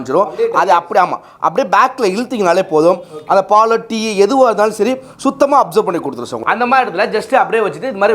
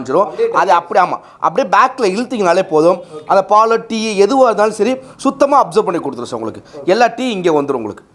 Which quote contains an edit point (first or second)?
first